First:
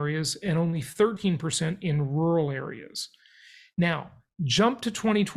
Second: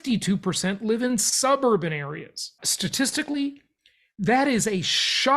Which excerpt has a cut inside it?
second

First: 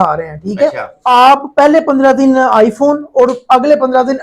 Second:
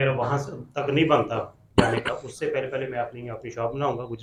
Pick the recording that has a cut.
first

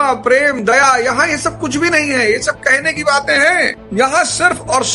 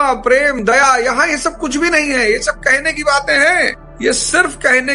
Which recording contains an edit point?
first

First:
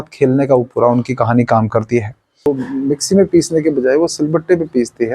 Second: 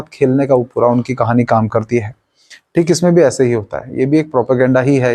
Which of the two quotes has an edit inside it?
first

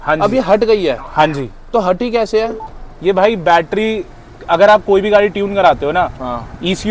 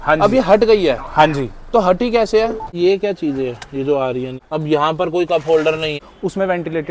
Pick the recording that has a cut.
second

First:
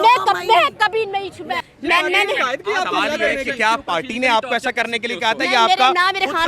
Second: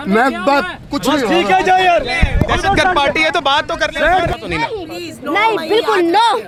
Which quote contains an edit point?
first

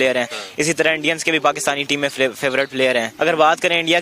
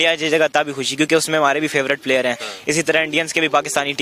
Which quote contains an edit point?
first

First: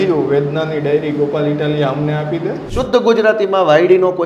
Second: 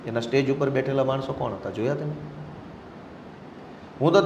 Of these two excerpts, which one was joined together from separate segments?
first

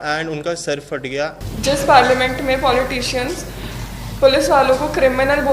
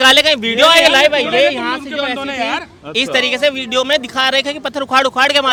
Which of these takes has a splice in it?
first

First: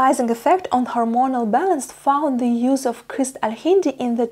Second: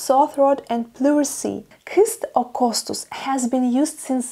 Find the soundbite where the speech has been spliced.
second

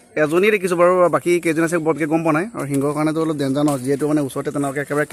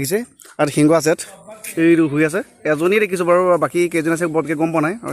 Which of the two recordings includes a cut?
second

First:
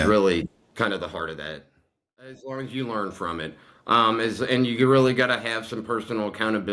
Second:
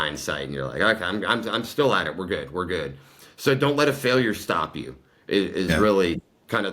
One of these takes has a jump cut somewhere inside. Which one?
first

